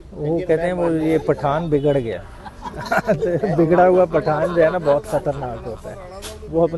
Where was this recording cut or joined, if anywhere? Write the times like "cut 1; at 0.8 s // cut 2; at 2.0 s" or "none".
none